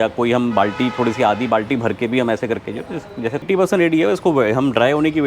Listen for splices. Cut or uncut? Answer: cut